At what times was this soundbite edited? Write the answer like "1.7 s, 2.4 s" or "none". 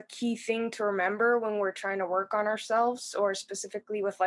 none